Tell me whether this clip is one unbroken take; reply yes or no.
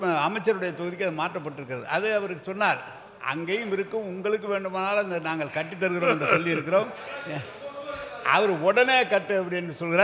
yes